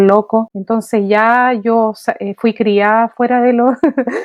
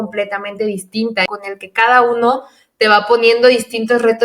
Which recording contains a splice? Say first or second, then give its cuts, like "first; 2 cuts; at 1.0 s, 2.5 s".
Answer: second; 1 cut; at 1.2 s